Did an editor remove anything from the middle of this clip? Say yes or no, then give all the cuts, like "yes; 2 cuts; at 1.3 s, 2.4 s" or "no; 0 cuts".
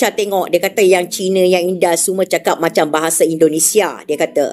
no; 0 cuts